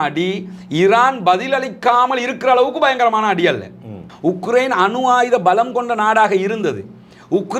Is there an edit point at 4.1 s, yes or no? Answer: yes